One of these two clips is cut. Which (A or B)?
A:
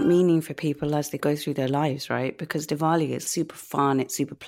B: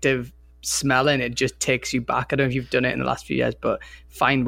A